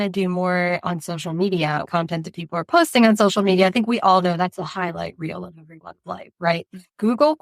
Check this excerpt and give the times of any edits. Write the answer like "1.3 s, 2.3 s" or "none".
1.8 s